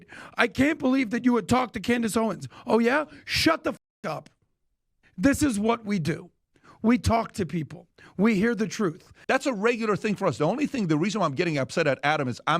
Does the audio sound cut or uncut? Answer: cut